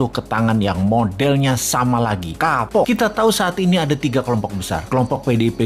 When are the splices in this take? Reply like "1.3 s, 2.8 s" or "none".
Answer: 2.9 s